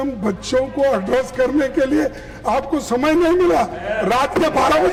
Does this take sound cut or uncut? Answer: uncut